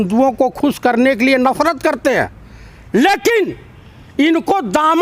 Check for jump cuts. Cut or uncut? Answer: uncut